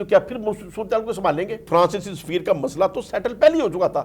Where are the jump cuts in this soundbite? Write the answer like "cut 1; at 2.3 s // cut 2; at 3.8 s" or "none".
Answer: cut 1; at 1.6 s